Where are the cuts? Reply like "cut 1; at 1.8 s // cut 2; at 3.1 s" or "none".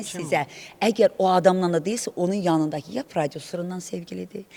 none